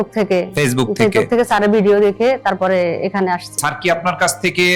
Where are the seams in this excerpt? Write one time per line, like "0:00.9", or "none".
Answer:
0:03.6